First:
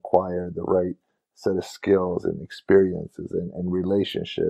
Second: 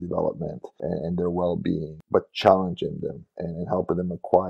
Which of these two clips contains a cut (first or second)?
second